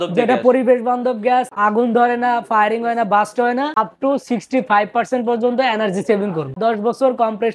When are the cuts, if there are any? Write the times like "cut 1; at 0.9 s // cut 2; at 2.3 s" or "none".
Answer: cut 1; at 1.5 s // cut 2; at 3.8 s // cut 3; at 6.6 s